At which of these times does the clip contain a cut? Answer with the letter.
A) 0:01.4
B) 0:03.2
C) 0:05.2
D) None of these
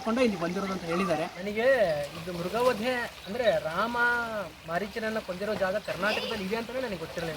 A